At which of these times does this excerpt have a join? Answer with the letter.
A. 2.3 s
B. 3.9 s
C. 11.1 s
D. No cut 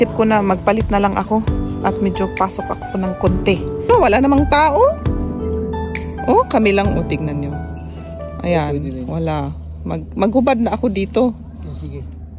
B